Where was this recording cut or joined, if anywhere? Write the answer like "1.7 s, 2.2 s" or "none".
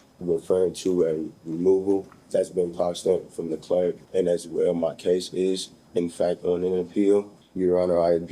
2.2 s, 4.0 s, 7.4 s